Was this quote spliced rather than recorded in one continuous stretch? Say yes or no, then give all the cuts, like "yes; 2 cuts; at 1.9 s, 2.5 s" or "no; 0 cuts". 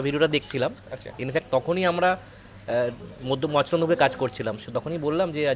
no; 0 cuts